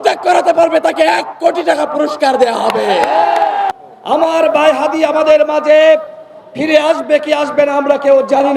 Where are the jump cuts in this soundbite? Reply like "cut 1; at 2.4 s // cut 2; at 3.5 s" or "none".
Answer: cut 1; at 3.7 s